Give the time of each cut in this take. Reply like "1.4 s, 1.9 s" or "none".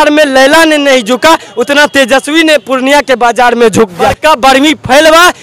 4.2 s